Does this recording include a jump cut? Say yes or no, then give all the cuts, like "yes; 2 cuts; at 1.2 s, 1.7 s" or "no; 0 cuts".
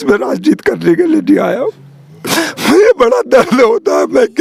no; 0 cuts